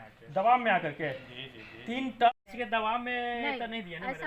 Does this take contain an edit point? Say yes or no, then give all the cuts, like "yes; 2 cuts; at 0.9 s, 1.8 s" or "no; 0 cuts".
yes; 1 cut; at 2.3 s